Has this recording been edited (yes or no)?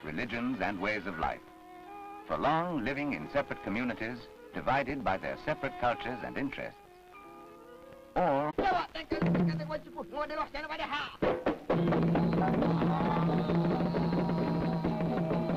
no